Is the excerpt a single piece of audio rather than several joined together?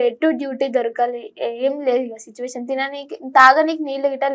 yes; 0 cuts

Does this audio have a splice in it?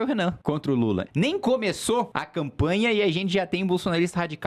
yes; 2 cuts; at 1.0 s, 2.2 s

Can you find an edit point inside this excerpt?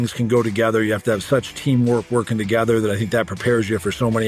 no; 0 cuts

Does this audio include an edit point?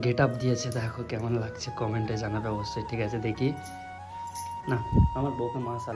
no; 0 cuts

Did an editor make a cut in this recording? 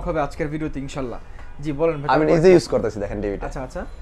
no; 0 cuts

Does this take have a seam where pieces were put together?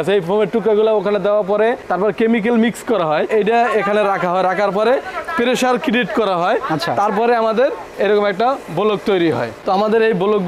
yes; 2 cuts; at 3.3 s, 9.5 s

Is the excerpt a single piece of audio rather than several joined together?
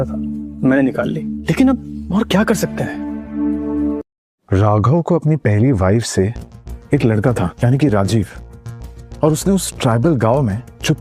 no; 1 cut; at 4.1 s

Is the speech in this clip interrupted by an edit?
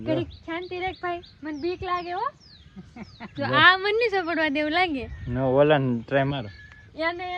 no; 0 cuts

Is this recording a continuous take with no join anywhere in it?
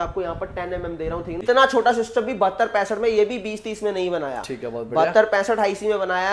no; 1 cut; at 1.4 s

